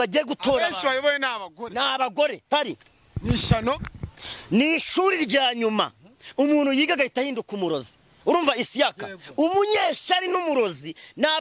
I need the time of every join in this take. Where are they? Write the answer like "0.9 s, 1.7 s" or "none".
2.4 s